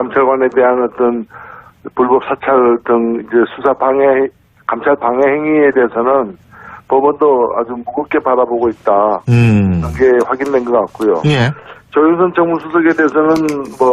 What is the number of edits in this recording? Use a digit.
1